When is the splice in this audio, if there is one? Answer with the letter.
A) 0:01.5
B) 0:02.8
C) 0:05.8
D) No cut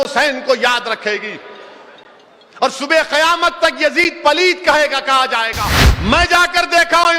C